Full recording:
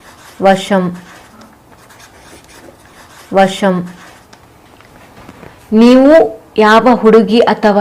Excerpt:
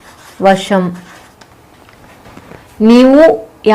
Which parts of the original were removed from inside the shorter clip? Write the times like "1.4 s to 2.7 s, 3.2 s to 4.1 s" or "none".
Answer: 1.2 s to 4.1 s